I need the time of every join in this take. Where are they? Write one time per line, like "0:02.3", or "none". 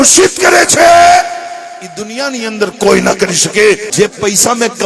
0:03.9